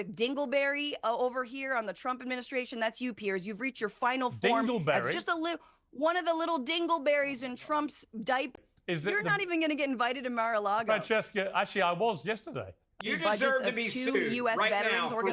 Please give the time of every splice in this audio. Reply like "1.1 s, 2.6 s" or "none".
8.5 s, 12.9 s